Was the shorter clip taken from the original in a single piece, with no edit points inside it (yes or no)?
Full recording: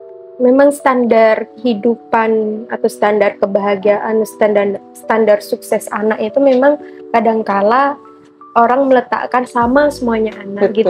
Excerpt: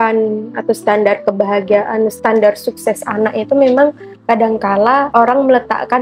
no